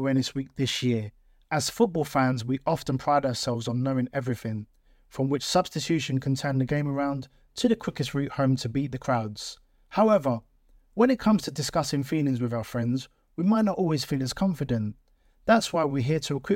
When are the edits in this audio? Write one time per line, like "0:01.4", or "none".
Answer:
none